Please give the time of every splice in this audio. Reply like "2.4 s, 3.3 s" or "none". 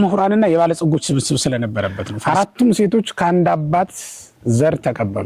2.1 s